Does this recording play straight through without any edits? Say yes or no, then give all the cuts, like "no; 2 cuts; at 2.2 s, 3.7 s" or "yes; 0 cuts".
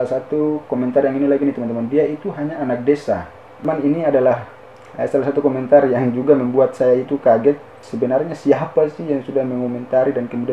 no; 2 cuts; at 3.7 s, 7.8 s